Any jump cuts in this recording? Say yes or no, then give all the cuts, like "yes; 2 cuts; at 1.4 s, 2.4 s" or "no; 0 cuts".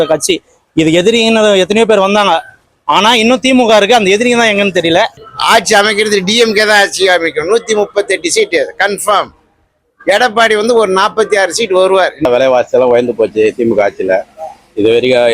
yes; 2 cuts; at 5.3 s, 12.3 s